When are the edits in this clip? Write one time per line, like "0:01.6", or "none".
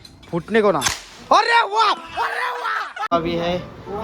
0:03.1